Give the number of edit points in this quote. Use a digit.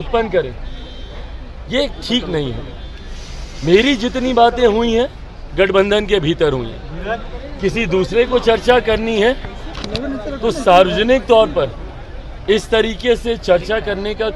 0